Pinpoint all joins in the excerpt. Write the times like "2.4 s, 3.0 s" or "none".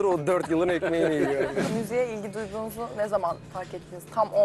1.7 s